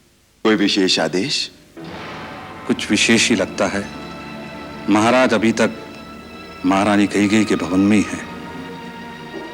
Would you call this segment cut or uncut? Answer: uncut